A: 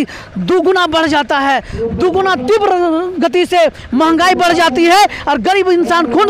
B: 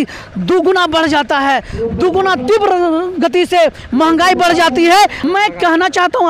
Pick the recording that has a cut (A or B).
B